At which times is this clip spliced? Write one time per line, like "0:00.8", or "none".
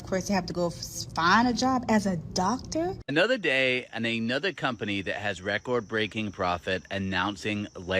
0:03.0